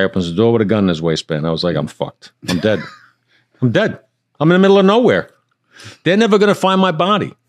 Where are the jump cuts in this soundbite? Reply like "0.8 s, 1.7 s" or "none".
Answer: none